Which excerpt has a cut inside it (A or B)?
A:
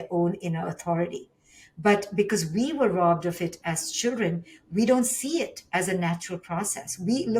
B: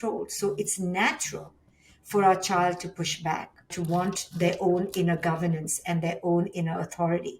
B